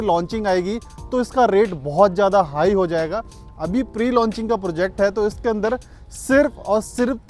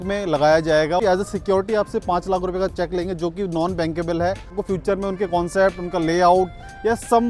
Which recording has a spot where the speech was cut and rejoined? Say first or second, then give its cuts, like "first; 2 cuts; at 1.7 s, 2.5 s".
second; 2 cuts; at 1.0 s, 4.6 s